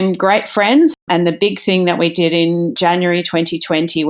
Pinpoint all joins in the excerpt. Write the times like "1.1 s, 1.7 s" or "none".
1.0 s, 2.8 s